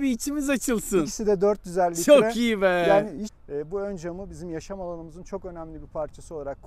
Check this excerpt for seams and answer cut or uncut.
cut